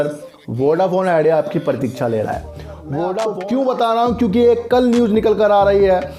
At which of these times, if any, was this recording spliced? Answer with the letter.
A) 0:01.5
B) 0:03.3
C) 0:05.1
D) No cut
B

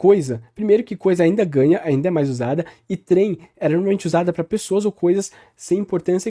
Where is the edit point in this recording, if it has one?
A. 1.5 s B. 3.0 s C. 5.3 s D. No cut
D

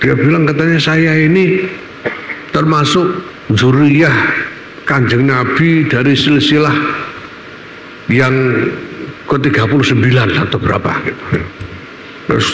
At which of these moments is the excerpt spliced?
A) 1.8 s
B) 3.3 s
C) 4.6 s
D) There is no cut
B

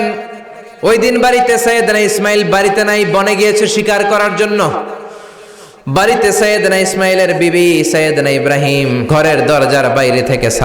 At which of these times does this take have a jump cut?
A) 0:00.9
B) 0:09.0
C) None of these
B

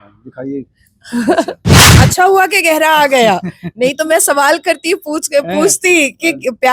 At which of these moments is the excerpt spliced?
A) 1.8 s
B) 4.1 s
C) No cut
A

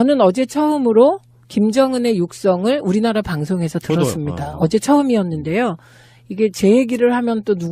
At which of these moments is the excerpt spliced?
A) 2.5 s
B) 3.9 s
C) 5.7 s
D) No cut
B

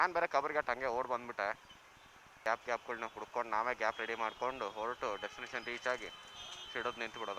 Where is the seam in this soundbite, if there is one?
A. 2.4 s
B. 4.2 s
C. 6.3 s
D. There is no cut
A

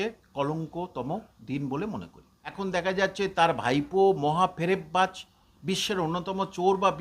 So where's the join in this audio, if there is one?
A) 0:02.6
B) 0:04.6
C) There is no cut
A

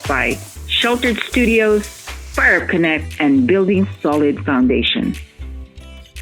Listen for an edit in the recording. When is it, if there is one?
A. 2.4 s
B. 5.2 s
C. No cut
B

